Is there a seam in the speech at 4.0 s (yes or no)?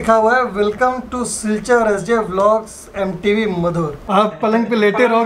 yes